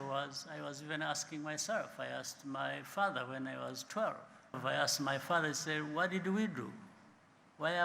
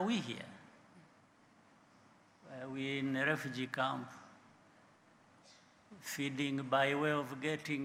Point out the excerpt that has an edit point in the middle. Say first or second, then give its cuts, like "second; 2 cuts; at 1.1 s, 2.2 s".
first; 1 cut; at 4.6 s